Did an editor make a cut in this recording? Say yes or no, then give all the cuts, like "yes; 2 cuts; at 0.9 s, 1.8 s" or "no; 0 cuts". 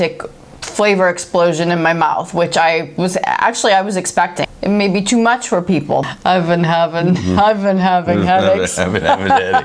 yes; 2 cuts; at 4.4 s, 6.1 s